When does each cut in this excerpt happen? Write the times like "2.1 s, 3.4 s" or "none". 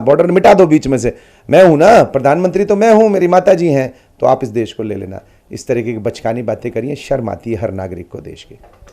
none